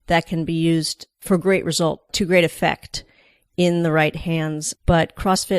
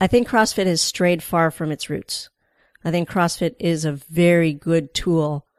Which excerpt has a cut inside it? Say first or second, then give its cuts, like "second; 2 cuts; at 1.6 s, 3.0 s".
first; 3 cuts; at 1.2 s, 2.1 s, 4.7 s